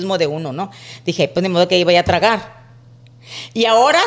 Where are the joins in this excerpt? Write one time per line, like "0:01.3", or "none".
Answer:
none